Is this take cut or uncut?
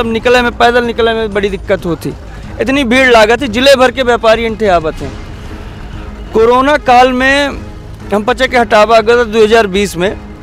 uncut